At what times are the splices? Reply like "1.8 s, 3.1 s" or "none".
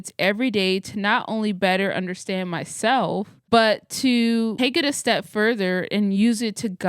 3.3 s